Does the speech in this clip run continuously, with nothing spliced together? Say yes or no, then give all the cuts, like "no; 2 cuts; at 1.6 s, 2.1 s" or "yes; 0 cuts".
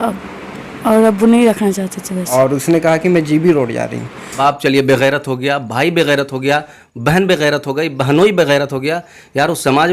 no; 2 cuts; at 2.3 s, 4.2 s